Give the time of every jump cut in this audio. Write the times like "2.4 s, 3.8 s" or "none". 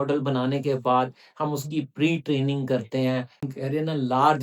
3.5 s